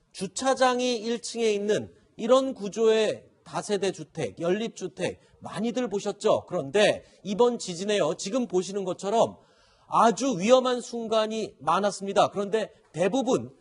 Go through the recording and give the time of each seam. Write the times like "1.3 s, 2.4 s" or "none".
1.4 s